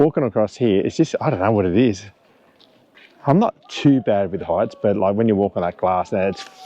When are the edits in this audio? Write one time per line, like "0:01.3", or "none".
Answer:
none